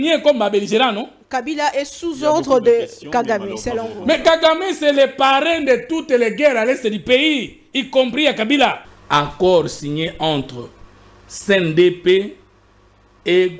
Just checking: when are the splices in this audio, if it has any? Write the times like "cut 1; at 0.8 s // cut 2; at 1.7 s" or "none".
cut 1; at 8.9 s